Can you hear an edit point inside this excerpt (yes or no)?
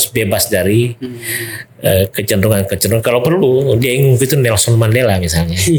no